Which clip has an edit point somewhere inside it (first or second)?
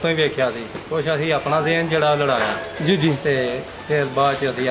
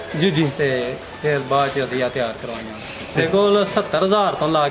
second